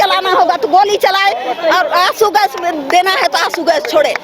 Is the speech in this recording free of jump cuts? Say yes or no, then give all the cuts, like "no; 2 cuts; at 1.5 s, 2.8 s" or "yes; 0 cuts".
yes; 0 cuts